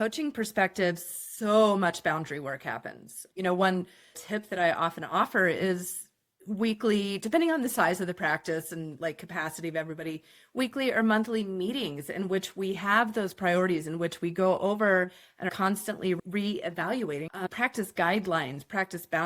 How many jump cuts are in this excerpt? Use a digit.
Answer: 2